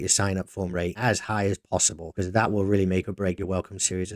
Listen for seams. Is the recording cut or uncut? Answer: cut